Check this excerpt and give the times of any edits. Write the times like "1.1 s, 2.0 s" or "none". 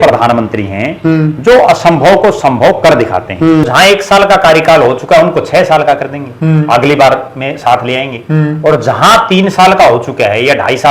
3.6 s